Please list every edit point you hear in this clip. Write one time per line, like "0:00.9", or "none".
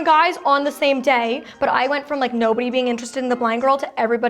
0:01.5